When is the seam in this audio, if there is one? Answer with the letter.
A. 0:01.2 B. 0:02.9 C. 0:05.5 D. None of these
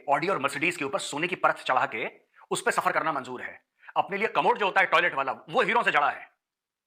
D